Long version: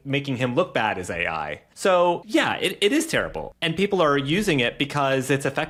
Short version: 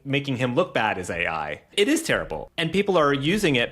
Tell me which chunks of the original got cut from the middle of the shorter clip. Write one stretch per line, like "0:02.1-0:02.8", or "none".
0:01.7-0:02.7